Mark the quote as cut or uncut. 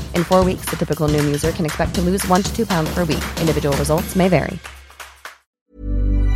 cut